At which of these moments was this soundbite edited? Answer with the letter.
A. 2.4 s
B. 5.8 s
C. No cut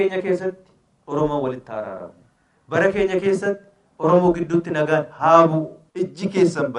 B